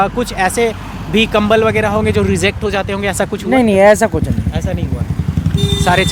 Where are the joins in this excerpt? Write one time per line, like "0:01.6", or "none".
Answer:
none